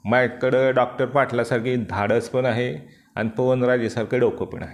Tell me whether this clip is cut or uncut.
uncut